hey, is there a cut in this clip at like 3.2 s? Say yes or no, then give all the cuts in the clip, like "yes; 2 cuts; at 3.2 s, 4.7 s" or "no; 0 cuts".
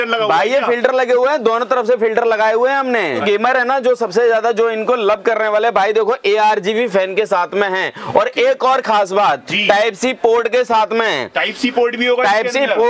yes; 1 cut; at 3.2 s